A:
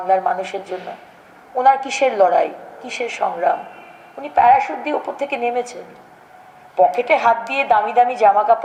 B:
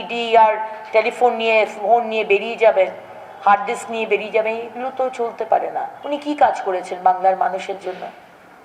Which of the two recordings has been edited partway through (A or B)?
B